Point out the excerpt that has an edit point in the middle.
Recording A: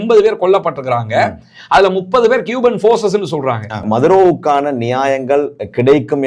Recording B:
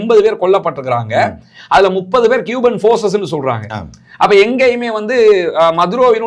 A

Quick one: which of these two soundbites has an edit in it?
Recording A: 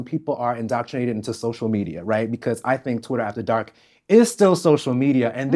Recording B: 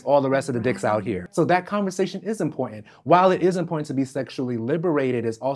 B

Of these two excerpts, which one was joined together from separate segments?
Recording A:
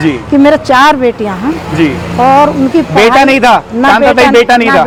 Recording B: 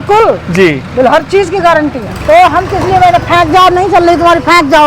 B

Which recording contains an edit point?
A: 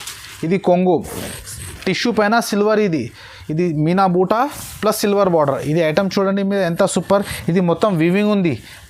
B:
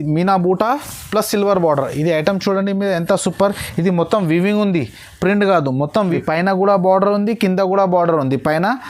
B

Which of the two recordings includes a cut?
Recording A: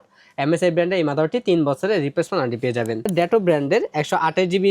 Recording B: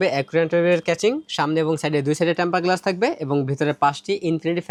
A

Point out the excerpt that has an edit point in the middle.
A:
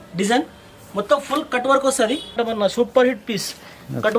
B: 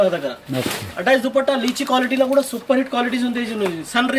A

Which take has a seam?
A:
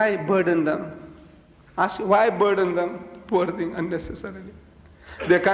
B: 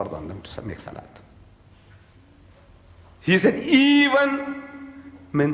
A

